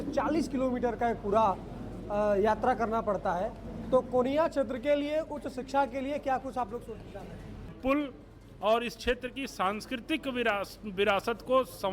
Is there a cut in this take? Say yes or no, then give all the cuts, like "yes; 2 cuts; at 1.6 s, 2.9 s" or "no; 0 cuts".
yes; 1 cut; at 7.7 s